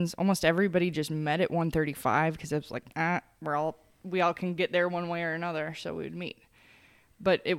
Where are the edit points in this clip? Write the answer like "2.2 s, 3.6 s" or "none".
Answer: none

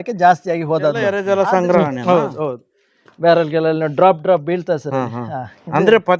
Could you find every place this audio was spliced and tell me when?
1.2 s

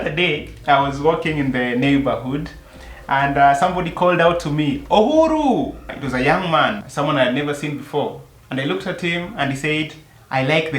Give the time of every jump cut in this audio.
none

